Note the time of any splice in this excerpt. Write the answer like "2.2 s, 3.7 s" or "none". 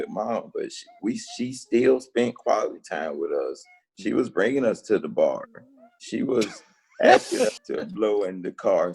7.6 s